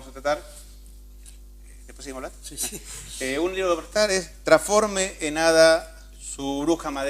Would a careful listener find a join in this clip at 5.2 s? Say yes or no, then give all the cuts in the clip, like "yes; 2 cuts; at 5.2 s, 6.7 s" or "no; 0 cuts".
yes; 1 cut; at 5.2 s